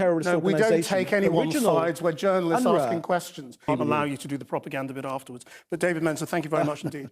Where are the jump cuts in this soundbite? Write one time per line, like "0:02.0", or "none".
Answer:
0:03.7

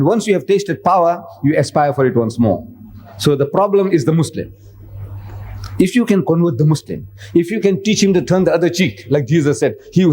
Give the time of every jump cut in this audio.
0:06.5
0:09.0

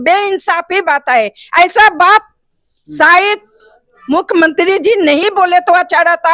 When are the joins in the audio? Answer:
none

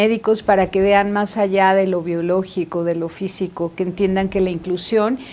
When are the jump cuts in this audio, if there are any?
0:03.9

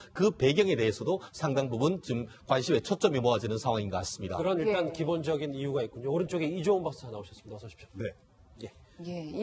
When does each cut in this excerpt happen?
none

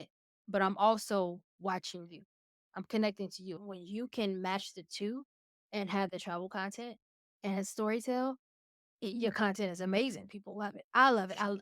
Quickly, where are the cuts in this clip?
0:03.6

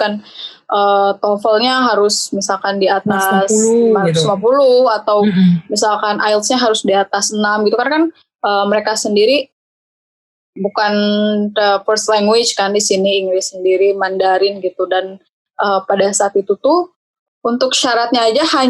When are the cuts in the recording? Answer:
none

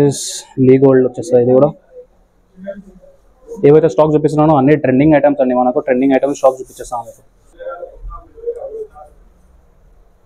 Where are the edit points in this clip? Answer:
none

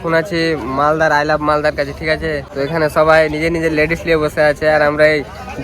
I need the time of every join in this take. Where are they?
0:02.5

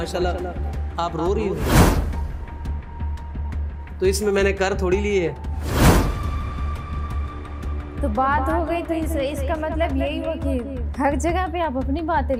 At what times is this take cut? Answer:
none

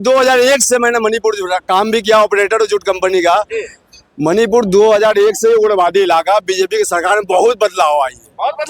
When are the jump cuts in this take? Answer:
none

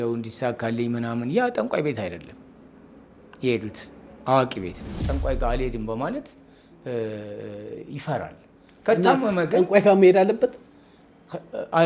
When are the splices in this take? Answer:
0:05.0

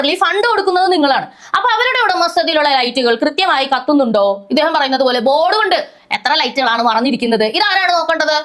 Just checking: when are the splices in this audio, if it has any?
none

